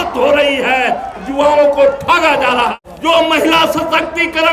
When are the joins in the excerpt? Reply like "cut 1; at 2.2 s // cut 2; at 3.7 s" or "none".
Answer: cut 1; at 2.8 s